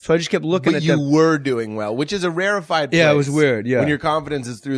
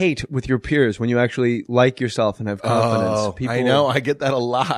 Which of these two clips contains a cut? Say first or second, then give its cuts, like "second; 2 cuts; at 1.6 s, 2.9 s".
second; 1 cut; at 3.2 s